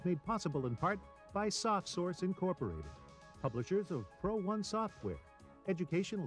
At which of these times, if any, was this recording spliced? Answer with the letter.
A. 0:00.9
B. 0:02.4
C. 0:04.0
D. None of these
D